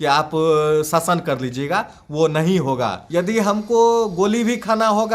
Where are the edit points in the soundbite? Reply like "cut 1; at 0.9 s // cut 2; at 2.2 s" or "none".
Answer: cut 1; at 3.0 s